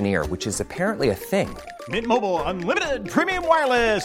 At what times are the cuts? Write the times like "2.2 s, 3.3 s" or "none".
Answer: none